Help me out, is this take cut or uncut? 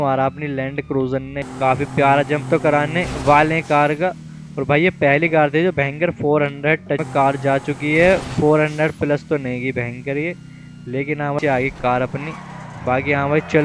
cut